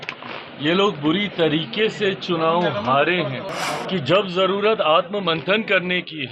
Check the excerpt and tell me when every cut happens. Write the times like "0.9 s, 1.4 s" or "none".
3.5 s